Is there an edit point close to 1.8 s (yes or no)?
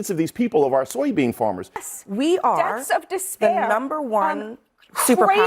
yes